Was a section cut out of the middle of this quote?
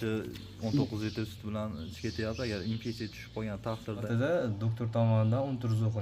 yes; 1 cut; at 4.1 s

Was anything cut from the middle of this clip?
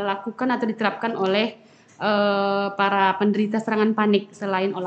no; 0 cuts

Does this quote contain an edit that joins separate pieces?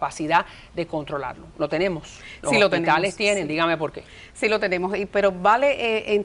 no; 0 cuts

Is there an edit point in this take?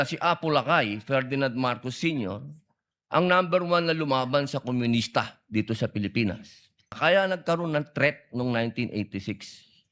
yes; 1 cut; at 6.9 s

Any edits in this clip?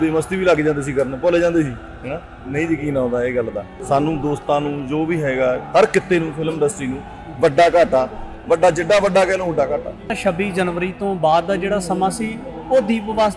yes; 2 cuts; at 3.7 s, 10.1 s

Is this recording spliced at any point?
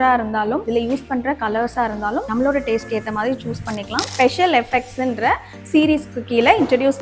yes; 1 cut; at 4.0 s

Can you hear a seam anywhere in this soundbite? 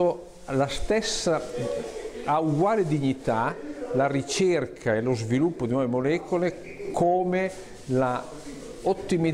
no; 0 cuts

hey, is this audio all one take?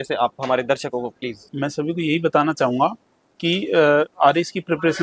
yes; 0 cuts

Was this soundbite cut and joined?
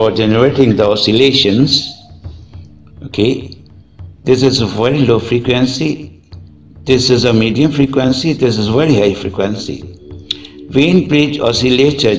no; 0 cuts

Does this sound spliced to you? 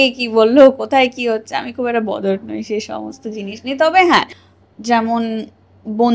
yes; 1 cut; at 4.4 s

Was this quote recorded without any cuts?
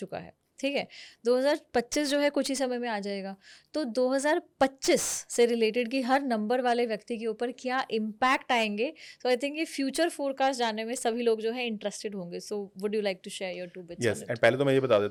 yes; 0 cuts

